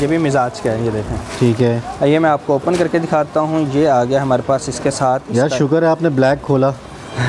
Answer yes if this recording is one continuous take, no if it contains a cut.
yes